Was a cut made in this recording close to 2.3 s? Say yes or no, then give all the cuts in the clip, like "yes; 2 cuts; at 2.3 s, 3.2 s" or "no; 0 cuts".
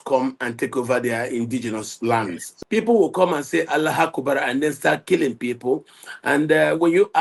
yes; 1 cut; at 2.3 s